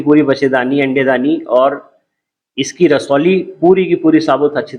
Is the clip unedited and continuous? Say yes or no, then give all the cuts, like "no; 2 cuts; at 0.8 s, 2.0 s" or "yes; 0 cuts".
yes; 0 cuts